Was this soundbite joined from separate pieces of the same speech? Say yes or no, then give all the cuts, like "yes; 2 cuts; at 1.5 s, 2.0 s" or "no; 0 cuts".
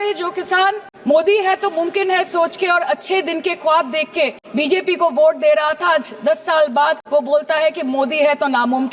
yes; 3 cuts; at 0.9 s, 4.4 s, 7.0 s